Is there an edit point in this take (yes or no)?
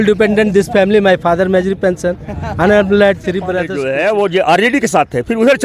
yes